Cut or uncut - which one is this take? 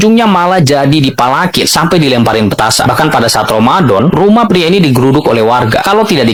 uncut